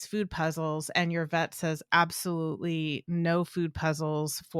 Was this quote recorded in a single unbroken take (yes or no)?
yes